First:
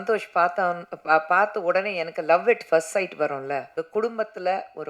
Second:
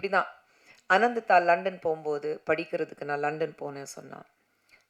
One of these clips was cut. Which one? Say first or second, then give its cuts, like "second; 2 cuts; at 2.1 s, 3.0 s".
first; 1 cut; at 3.8 s